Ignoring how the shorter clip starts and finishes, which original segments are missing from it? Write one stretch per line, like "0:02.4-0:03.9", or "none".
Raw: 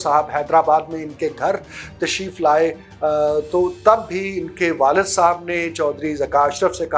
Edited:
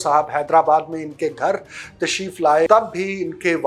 0:02.7-0:03.8